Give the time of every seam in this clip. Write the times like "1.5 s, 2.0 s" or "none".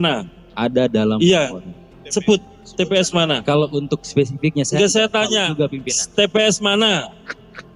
none